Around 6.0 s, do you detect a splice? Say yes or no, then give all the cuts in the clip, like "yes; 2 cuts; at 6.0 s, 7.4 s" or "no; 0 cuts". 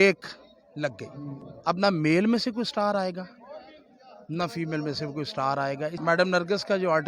yes; 2 cuts; at 1.5 s, 6.0 s